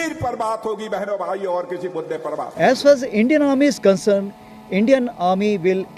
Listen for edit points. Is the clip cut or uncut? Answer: uncut